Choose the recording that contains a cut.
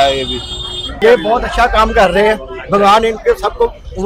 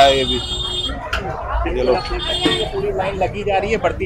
first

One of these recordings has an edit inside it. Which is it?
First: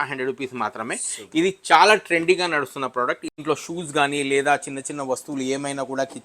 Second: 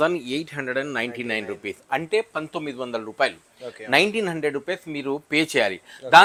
first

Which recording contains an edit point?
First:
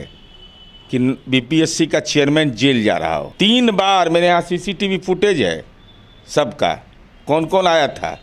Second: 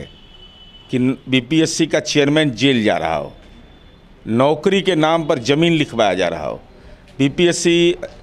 first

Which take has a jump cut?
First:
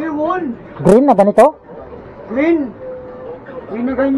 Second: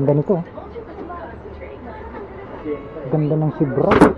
second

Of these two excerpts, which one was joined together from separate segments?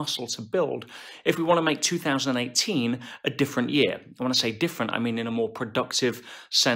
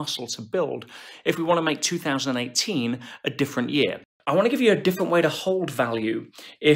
second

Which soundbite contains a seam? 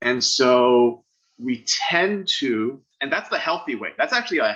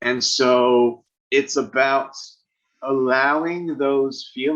second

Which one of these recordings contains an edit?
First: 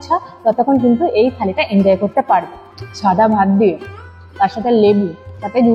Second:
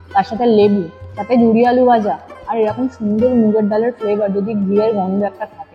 first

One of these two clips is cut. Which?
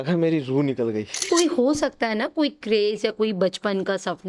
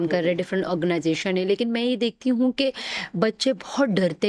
first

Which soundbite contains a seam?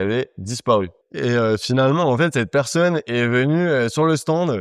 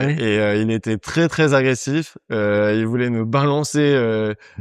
first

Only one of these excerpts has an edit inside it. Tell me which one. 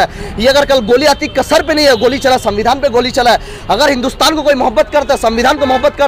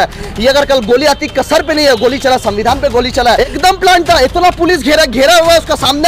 second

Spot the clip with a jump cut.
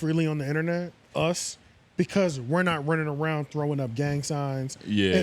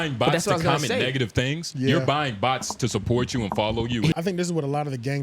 second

